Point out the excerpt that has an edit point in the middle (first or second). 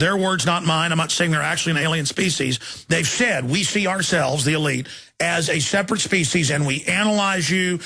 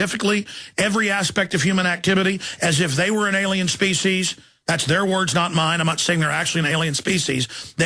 second